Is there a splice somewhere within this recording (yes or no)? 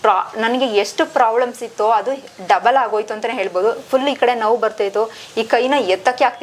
no